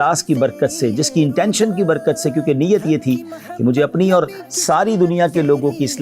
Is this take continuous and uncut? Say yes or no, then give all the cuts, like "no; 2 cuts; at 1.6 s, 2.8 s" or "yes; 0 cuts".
yes; 0 cuts